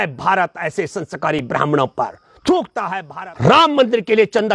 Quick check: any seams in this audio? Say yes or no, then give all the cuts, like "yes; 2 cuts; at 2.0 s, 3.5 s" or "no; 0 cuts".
yes; 1 cut; at 3.0 s